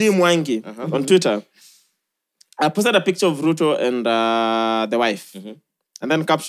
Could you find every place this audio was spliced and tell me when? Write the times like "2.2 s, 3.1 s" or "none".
none